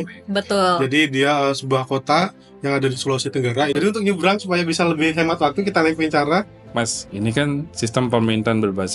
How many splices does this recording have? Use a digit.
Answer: 2